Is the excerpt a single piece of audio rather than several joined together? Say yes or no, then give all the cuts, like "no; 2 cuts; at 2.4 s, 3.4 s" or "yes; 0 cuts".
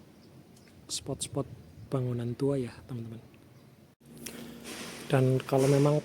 no; 1 cut; at 4.0 s